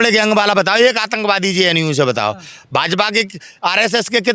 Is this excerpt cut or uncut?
uncut